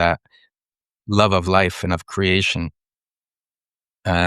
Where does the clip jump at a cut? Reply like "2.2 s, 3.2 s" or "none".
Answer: none